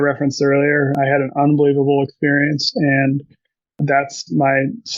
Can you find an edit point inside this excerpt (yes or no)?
yes